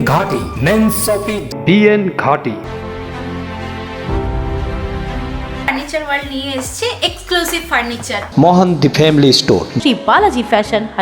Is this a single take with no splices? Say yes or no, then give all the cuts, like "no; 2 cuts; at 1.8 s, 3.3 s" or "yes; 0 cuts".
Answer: no; 3 cuts; at 1.5 s, 2.6 s, 5.6 s